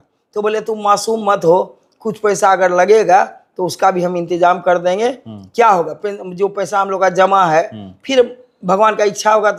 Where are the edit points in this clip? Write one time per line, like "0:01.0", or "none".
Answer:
none